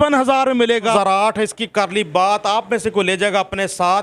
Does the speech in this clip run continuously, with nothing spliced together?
no; 1 cut; at 0.9 s

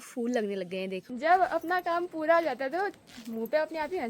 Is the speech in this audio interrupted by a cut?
yes; 1 cut; at 1.0 s

